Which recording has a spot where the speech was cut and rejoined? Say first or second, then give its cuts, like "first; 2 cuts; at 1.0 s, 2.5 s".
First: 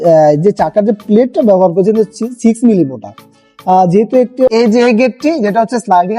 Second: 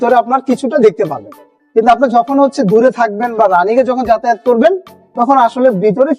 first; 1 cut; at 4.5 s